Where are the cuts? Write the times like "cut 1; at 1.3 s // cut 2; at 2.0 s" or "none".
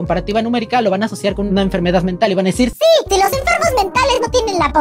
none